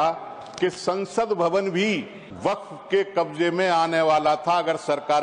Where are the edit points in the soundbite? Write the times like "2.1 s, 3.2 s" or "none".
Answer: 2.2 s